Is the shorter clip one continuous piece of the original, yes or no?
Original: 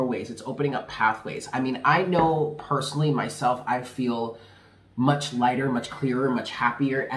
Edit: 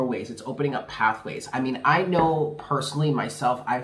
yes